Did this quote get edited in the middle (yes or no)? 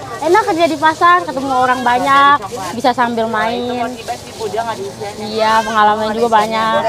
no